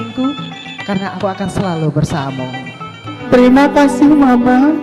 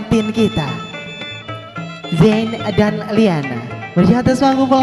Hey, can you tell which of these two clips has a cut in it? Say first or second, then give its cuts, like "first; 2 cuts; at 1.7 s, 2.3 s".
first; 1 cut; at 3.1 s